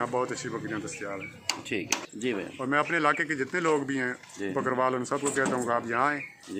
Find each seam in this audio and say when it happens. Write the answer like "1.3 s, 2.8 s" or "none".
none